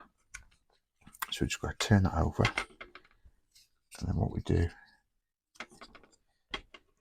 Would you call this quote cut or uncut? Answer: uncut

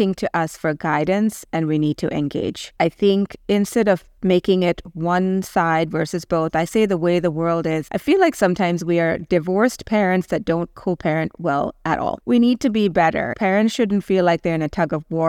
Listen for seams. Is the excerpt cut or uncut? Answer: cut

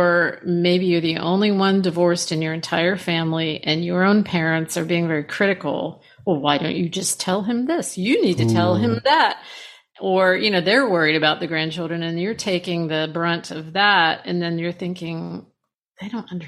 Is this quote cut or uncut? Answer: uncut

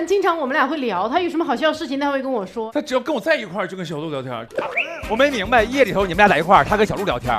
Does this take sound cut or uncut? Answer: cut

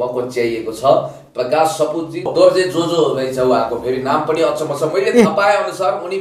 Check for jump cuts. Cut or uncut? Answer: cut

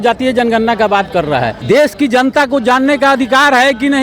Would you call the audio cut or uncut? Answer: cut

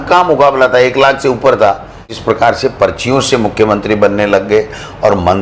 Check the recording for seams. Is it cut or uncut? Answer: cut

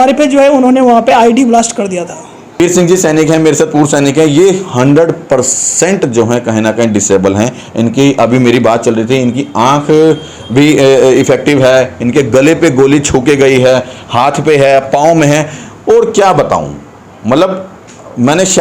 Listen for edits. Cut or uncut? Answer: cut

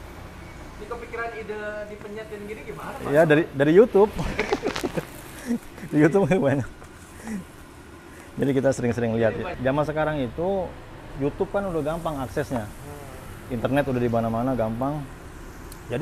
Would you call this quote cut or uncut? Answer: cut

